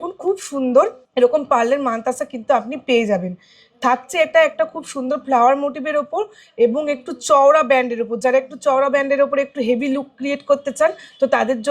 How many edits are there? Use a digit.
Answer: 1